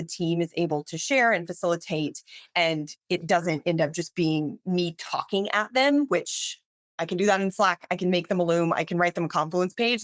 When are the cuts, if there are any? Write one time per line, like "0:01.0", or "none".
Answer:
none